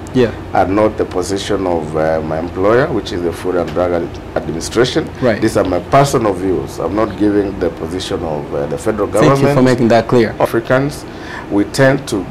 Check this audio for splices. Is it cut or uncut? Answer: cut